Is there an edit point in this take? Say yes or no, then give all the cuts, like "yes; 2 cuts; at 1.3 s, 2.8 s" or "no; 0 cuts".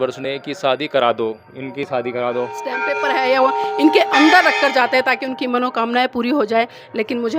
yes; 1 cut; at 2.8 s